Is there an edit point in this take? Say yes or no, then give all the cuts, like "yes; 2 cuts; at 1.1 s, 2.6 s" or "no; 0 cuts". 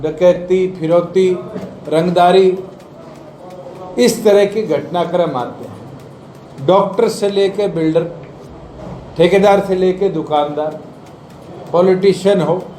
no; 0 cuts